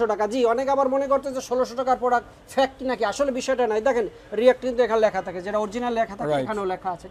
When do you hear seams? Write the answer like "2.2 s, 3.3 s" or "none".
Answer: none